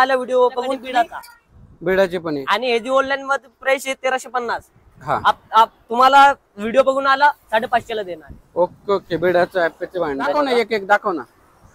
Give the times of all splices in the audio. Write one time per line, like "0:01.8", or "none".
0:00.8
0:10.4